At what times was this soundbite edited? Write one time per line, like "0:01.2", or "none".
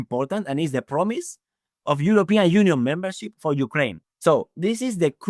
0:04.0